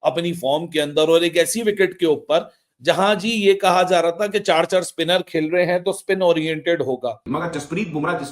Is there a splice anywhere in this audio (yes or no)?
yes